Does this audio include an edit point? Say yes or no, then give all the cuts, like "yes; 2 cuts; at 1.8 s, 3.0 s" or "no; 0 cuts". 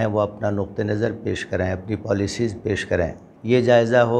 yes; 1 cut; at 3.3 s